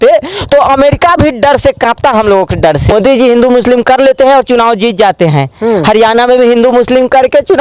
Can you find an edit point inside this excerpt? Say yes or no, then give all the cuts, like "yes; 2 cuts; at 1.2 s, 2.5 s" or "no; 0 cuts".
yes; 1 cut; at 2.9 s